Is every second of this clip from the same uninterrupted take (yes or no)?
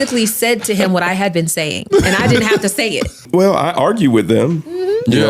no